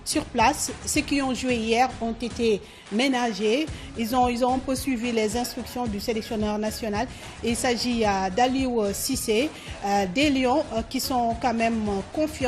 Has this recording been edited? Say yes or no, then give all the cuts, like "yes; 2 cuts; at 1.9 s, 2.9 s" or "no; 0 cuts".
no; 0 cuts